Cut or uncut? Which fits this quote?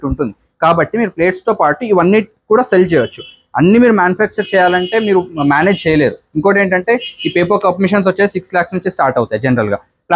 uncut